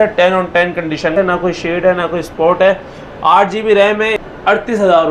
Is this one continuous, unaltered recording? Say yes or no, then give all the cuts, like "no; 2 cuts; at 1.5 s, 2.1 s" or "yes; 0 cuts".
no; 2 cuts; at 1.1 s, 4.2 s